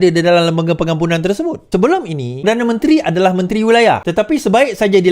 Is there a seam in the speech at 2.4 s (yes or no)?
yes